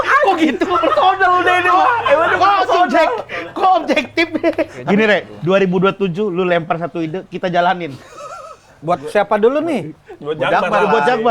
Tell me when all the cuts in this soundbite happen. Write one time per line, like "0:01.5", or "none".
0:04.7
0:08.7